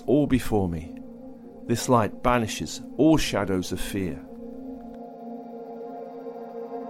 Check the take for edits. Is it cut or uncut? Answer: cut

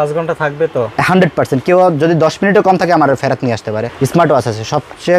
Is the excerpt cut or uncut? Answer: cut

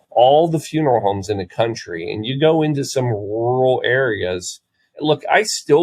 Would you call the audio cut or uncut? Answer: uncut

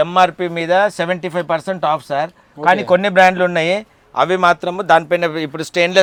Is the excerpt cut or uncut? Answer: uncut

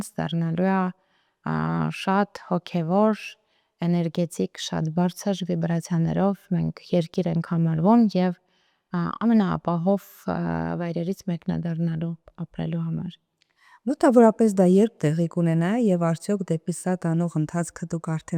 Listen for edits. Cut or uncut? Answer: uncut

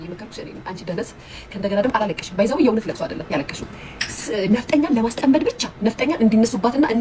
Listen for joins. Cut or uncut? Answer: uncut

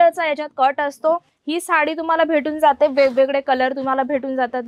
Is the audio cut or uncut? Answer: cut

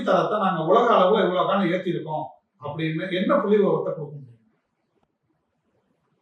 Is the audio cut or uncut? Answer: uncut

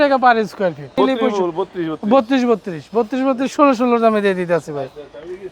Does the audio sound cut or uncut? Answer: cut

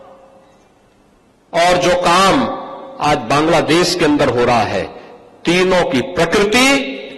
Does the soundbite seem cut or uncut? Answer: uncut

